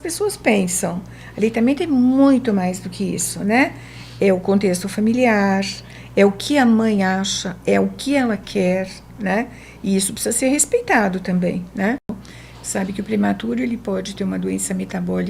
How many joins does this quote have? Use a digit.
1